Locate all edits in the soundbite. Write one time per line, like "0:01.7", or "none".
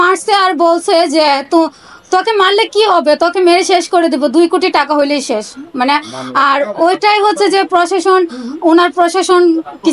none